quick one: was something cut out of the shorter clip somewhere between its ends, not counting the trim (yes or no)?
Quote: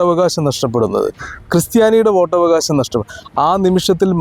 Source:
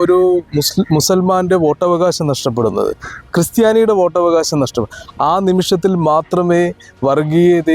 no